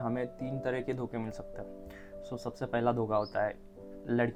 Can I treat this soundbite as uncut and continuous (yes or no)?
yes